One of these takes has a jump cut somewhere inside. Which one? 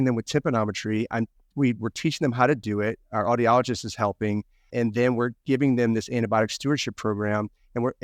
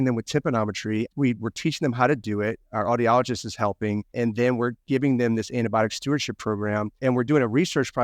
second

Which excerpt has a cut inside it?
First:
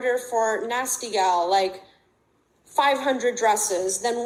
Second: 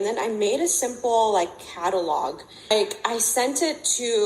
second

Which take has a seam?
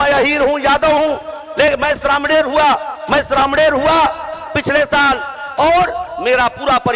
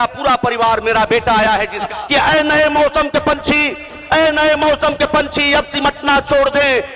second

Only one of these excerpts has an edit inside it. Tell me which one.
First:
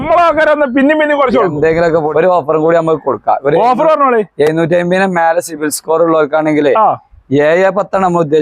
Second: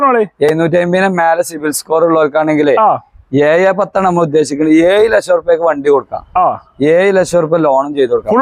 first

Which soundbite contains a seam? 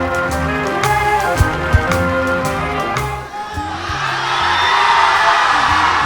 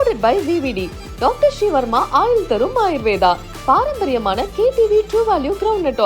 first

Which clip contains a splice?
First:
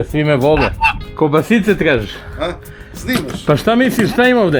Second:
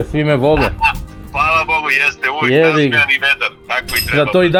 first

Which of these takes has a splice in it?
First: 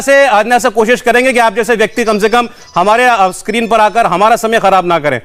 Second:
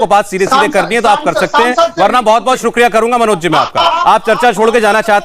second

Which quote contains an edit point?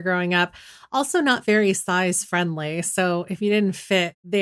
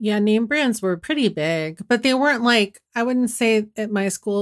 second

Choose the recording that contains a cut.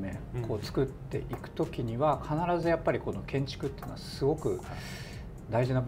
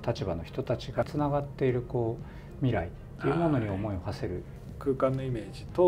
second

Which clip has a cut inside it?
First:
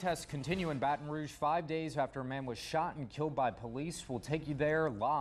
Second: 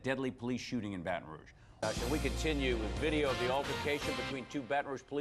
second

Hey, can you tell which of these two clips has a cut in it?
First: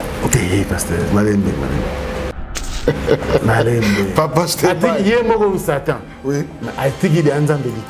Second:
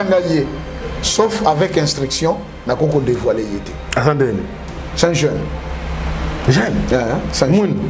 first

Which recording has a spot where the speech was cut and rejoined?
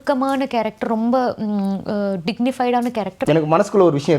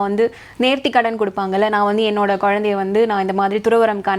first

